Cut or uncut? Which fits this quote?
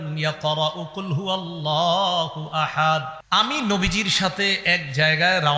cut